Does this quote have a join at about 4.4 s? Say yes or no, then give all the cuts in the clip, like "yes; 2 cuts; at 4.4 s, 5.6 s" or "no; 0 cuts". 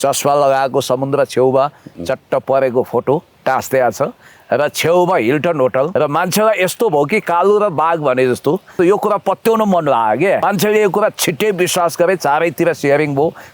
no; 3 cuts; at 5.9 s, 8.7 s, 10.4 s